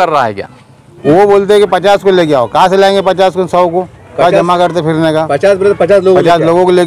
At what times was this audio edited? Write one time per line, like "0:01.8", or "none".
0:01.0